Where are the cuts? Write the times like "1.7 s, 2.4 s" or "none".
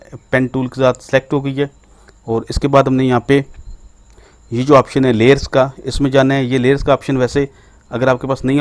none

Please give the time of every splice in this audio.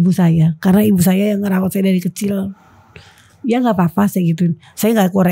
none

